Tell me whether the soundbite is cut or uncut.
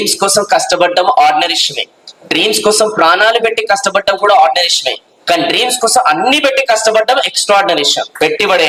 uncut